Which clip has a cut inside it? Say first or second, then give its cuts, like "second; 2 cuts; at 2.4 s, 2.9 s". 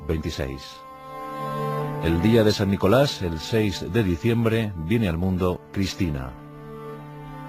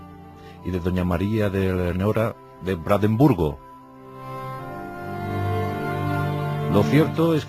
first; 1 cut; at 4.4 s